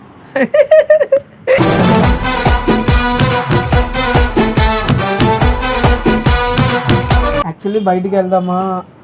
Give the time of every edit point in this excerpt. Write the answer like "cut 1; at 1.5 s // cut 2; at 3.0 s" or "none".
cut 1; at 7.4 s